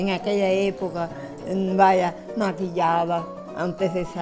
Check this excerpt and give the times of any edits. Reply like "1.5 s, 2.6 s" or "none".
none